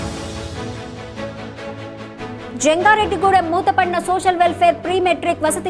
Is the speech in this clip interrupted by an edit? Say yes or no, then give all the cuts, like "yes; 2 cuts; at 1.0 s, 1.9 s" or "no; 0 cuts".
yes; 1 cut; at 2.6 s